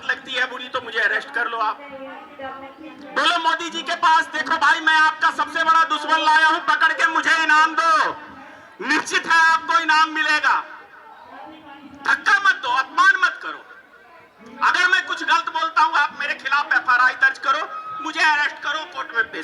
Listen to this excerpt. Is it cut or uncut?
uncut